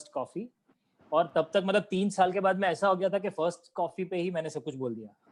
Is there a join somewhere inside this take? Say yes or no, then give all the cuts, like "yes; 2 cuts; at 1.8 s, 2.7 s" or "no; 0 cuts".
no; 0 cuts